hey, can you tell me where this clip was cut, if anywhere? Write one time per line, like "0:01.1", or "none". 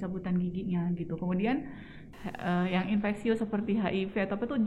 0:02.0